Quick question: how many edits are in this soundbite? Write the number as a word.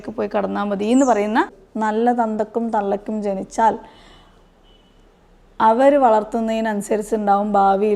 one